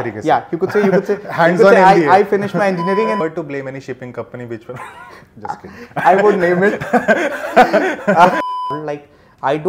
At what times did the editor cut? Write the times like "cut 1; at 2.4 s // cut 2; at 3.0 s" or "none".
cut 1; at 3.2 s // cut 2; at 8.5 s